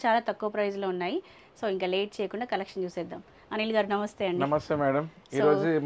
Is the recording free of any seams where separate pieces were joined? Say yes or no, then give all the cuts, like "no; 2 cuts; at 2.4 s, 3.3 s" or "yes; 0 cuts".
yes; 0 cuts